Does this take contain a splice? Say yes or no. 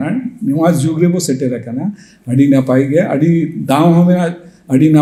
no